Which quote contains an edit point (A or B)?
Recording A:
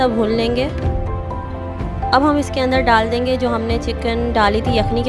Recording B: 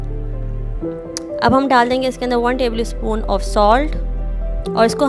B